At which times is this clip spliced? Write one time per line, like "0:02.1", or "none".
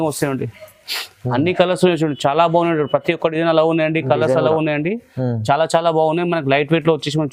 none